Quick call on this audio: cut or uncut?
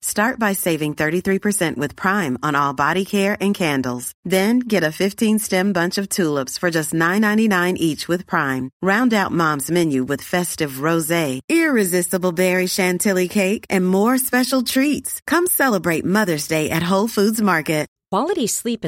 uncut